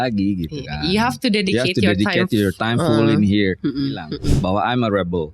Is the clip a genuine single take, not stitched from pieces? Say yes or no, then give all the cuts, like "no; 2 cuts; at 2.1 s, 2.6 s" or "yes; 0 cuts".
no; 1 cut; at 4.1 s